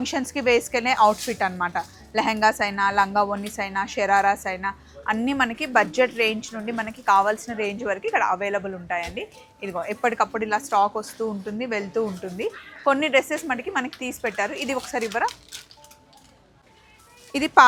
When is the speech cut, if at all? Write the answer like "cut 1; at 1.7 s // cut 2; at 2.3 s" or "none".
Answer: none